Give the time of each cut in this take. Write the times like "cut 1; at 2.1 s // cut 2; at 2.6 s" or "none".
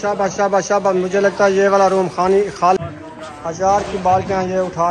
cut 1; at 2.8 s